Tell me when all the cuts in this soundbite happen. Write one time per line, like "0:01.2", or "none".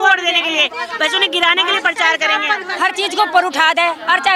0:02.6